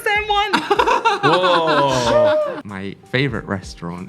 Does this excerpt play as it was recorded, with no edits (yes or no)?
no